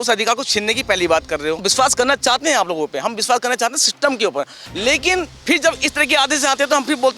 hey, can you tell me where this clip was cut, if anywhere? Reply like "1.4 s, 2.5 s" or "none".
1.7 s, 4.6 s